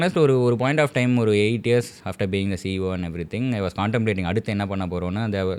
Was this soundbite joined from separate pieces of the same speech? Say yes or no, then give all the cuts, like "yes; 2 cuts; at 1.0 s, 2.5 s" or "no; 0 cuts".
no; 0 cuts